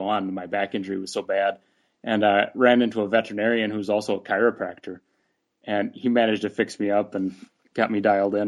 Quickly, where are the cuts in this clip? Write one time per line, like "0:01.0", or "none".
none